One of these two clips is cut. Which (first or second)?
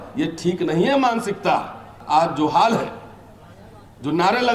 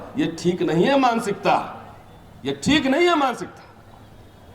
first